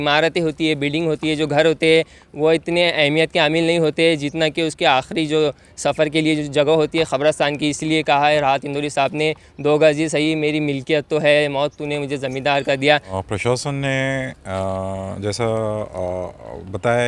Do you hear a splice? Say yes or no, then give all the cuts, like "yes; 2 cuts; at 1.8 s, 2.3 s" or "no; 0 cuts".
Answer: yes; 1 cut; at 13.1 s